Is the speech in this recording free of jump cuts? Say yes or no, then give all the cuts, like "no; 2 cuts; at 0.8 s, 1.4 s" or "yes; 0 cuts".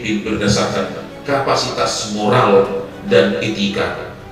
yes; 0 cuts